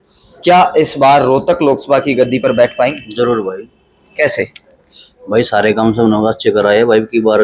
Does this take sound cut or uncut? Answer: uncut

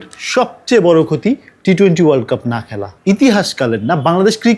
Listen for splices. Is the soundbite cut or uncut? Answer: cut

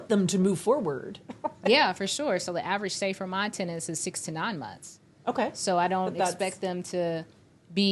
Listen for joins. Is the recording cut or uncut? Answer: uncut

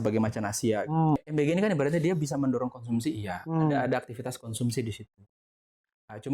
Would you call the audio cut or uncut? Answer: cut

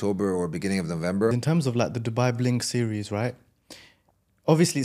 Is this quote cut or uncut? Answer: cut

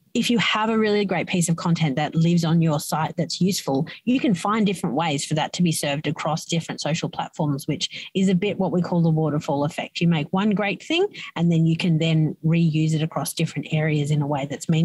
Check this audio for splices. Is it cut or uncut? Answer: uncut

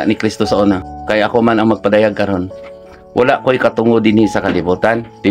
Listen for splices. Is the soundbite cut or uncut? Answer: cut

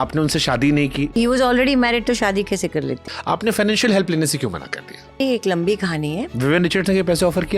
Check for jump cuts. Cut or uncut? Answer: cut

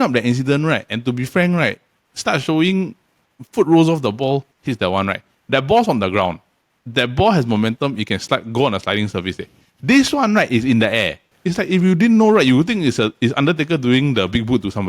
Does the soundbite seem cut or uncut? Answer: cut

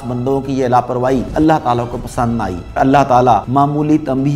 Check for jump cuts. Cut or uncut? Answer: cut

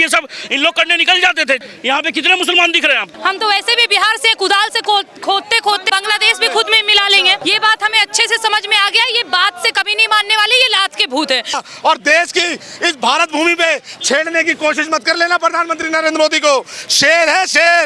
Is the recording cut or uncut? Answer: cut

